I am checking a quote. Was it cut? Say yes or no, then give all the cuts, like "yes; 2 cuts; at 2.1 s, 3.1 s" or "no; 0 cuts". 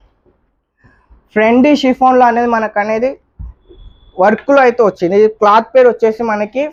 no; 0 cuts